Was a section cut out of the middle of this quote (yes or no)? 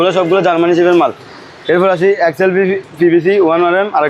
no